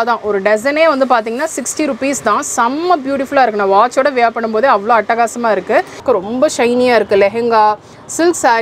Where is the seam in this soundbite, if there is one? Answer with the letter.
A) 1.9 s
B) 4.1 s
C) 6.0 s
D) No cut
C